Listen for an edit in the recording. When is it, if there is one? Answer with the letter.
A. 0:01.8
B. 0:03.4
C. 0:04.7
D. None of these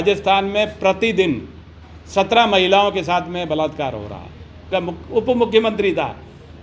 C